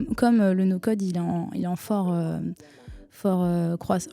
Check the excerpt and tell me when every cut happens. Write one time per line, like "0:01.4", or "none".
none